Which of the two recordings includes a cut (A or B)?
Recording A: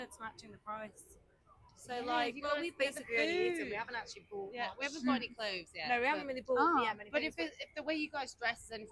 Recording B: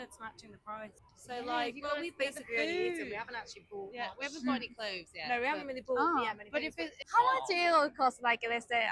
B